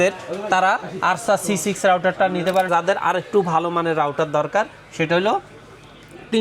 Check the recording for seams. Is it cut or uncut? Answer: cut